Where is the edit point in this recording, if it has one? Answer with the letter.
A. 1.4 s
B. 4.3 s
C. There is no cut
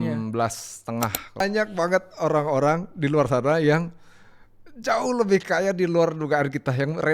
A